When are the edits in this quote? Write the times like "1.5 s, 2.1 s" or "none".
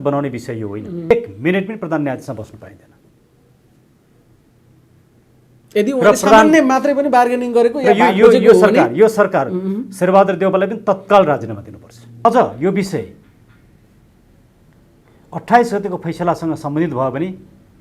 1.1 s, 12.2 s